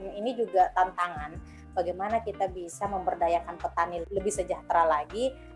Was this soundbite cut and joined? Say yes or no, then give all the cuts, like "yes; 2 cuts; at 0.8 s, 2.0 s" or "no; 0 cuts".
no; 0 cuts